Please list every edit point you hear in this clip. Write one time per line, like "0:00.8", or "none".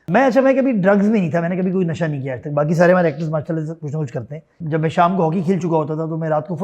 0:04.6